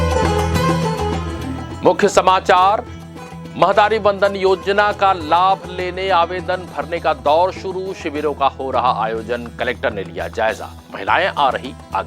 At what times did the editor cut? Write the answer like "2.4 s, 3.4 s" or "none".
1.7 s